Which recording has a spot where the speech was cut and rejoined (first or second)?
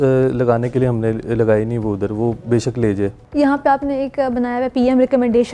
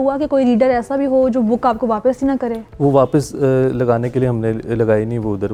first